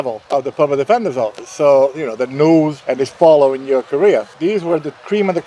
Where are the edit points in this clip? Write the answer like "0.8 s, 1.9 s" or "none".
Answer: 4.3 s